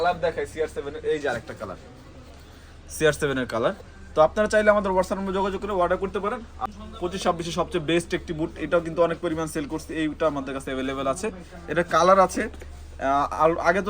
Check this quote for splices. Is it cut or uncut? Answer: cut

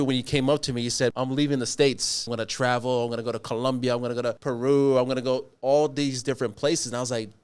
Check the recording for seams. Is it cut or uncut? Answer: cut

